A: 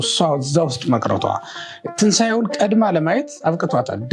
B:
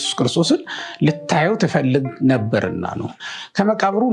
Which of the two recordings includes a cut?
B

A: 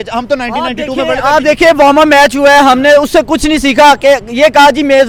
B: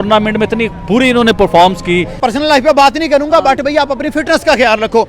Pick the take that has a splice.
B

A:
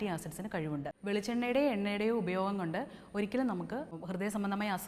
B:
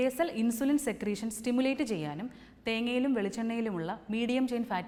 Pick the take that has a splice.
A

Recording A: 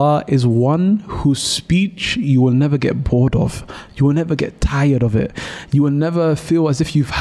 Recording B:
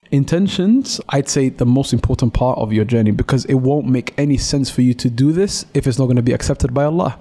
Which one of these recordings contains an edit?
B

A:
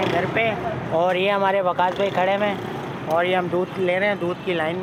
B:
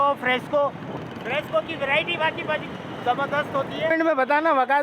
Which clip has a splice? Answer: B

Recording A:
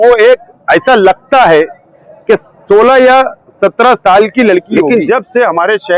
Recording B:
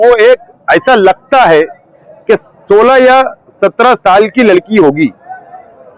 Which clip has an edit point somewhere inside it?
A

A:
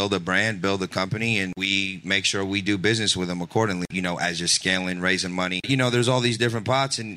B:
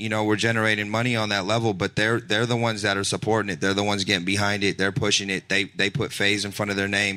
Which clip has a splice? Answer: A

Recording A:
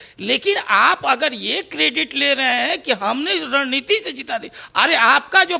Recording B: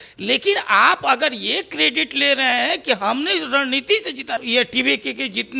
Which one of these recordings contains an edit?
B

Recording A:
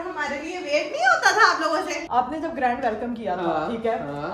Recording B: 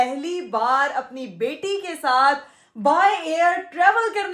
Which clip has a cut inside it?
A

